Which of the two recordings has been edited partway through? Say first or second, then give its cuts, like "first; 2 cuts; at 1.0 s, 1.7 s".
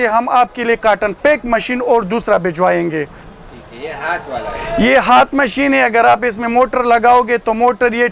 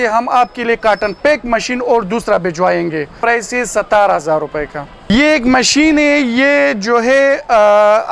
second; 2 cuts; at 3.2 s, 5.1 s